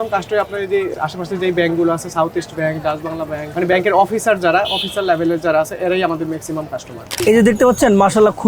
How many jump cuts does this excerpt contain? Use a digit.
3